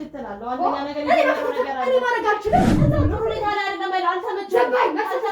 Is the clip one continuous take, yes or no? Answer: no